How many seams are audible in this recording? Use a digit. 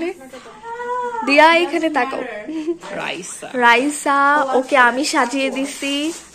1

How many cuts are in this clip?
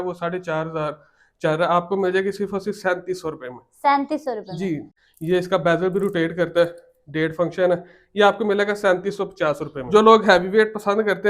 2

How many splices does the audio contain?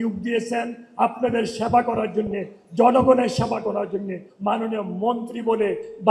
1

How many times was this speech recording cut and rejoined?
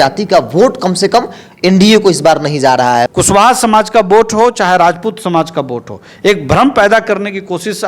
1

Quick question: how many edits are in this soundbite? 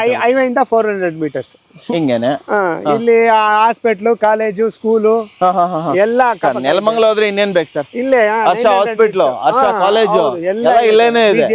1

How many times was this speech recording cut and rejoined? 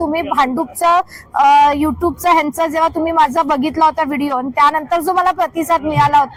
0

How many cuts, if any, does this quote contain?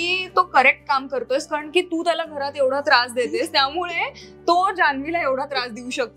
0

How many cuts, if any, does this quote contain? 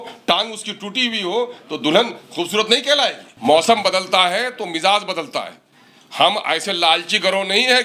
1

